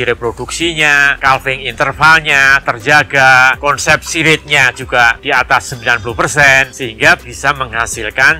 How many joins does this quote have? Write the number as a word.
three